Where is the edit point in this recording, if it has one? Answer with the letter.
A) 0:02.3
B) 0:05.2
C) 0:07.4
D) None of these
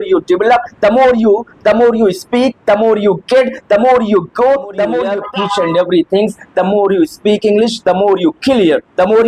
B